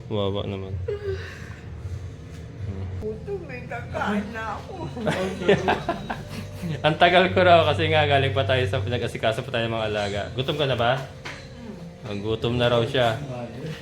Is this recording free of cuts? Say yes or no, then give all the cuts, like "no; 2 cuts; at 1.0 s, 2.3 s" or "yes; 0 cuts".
no; 1 cut; at 3.0 s